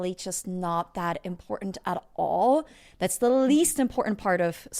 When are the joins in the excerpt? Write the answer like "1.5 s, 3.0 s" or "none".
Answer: none